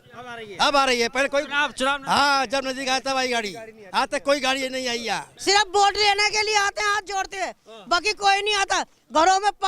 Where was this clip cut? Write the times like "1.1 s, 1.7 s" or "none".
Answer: 5.3 s